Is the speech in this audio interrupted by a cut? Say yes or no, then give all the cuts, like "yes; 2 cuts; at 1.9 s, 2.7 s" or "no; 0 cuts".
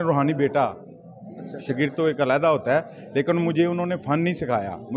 no; 0 cuts